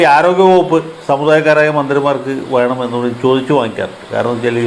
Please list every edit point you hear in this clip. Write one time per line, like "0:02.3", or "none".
none